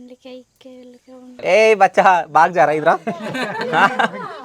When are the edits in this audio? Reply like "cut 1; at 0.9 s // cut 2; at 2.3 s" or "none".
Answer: cut 1; at 1.3 s